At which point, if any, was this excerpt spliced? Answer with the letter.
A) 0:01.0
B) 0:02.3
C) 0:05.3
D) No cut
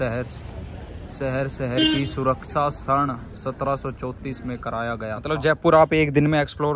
C